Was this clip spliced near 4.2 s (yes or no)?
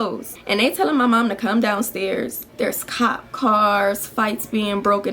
no